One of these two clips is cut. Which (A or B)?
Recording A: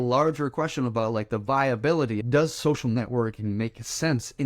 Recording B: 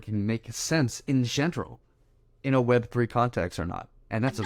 A